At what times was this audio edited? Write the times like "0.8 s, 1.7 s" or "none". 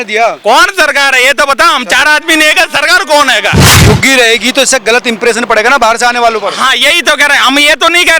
3.8 s